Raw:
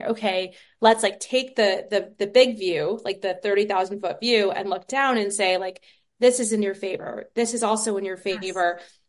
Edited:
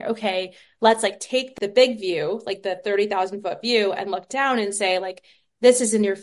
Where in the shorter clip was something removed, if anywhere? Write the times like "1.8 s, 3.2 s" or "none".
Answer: 1.5 s